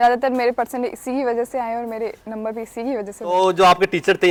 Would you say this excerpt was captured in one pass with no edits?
yes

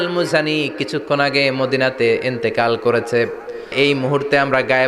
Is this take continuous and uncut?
no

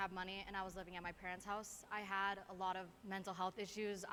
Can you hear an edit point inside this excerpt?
no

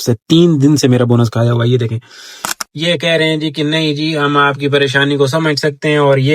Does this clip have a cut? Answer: yes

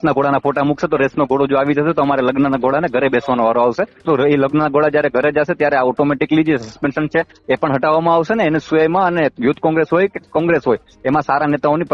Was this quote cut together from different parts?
yes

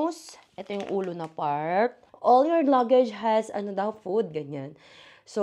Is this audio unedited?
no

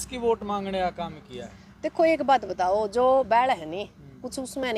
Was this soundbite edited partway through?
no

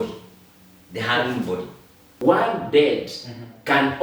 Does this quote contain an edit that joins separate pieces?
yes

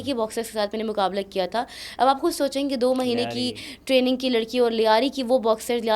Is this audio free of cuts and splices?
yes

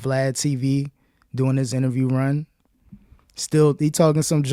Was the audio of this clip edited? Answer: no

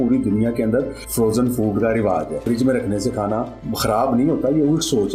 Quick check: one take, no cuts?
no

